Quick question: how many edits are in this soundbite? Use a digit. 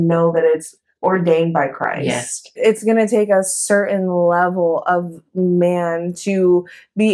1